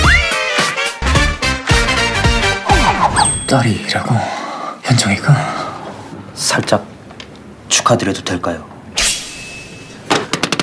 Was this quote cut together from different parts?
yes; 1 cut; at 3.0 s

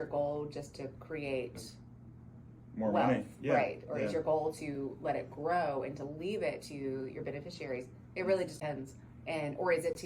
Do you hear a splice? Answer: yes; 1 cut; at 8.6 s

